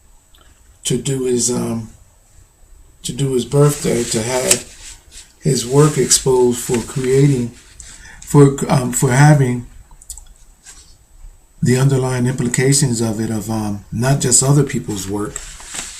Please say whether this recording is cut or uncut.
cut